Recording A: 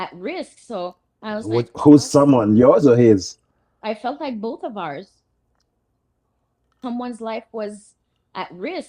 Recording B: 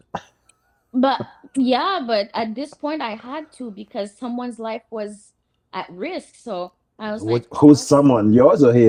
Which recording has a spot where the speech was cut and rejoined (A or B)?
A